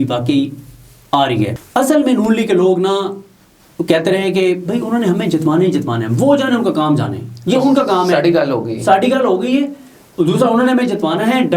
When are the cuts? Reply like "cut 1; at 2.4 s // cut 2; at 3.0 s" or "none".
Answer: cut 1; at 1.6 s